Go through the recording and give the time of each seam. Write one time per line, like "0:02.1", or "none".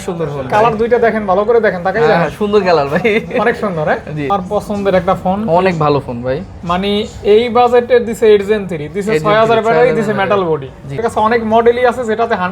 0:04.3
0:11.0